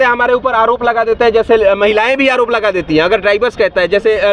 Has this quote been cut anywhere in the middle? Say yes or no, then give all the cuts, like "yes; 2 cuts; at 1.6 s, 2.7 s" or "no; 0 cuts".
no; 0 cuts